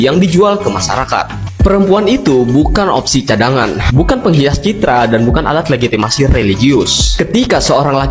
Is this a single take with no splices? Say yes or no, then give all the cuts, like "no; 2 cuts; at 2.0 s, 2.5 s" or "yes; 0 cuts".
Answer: yes; 0 cuts